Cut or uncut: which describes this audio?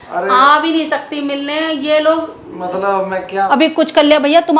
cut